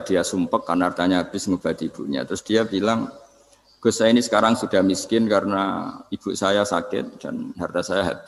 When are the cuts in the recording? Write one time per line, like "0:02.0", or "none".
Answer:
none